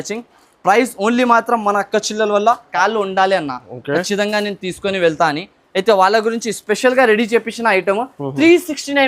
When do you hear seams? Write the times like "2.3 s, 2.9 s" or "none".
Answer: 2.7 s